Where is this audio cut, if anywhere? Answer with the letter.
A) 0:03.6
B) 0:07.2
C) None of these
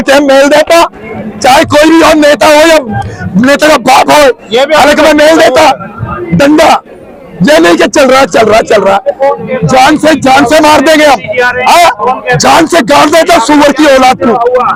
C